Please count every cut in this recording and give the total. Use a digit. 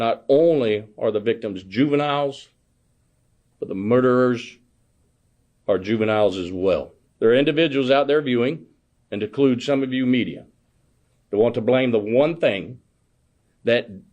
1